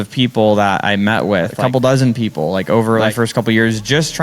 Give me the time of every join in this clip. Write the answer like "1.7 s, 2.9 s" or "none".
1.6 s, 3.1 s